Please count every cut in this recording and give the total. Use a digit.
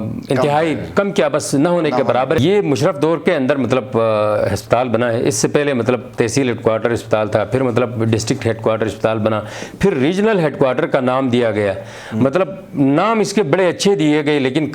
1